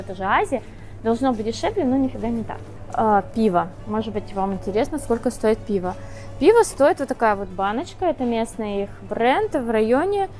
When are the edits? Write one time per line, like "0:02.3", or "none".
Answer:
none